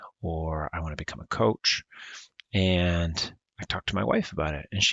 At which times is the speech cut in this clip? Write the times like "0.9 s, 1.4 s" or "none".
none